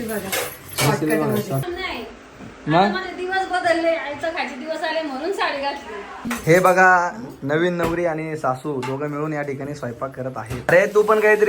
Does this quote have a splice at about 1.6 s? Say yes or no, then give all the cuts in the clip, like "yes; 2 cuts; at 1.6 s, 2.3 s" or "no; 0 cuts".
yes; 3 cuts; at 1.6 s, 6.3 s, 10.6 s